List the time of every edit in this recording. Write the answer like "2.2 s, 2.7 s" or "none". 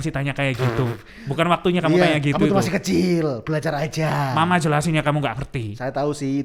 none